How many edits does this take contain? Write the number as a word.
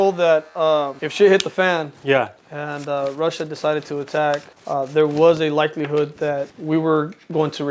three